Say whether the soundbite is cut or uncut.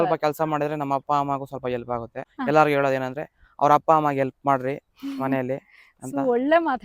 cut